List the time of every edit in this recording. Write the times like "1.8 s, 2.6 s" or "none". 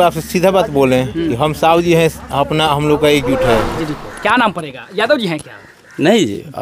3.7 s

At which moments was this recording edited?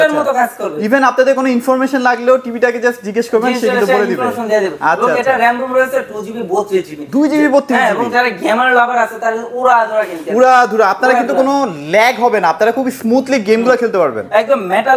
none

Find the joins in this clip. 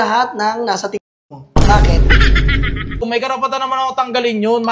3.1 s

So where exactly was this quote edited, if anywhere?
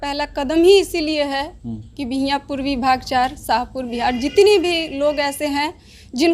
none

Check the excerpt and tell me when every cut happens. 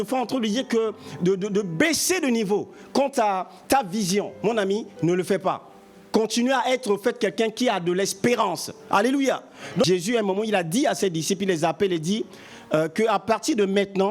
9.8 s

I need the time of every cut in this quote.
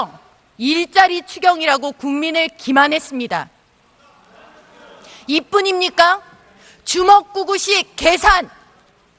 none

